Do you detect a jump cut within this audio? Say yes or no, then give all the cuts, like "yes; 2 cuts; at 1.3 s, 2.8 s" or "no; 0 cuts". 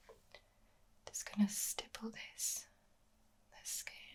no; 0 cuts